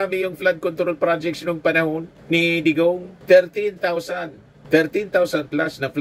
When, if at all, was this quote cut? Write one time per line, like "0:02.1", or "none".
none